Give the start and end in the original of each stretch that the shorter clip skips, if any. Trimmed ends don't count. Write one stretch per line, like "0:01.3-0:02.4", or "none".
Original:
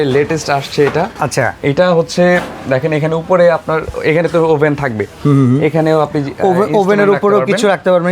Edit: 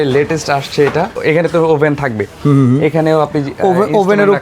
0:01.1-0:03.9